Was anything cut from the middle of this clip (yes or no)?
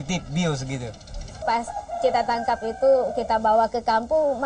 yes